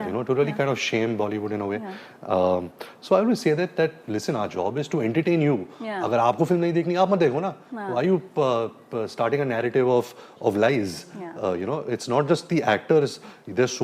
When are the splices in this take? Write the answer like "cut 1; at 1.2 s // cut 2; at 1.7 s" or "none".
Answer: none